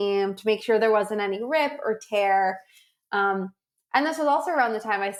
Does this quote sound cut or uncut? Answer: uncut